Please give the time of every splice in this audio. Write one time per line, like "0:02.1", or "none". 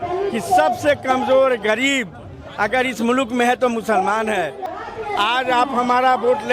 0:04.6